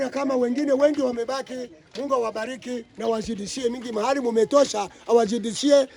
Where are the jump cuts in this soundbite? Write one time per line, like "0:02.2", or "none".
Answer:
none